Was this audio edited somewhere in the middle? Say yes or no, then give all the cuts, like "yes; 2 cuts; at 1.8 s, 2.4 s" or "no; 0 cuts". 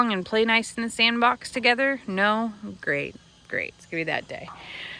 no; 0 cuts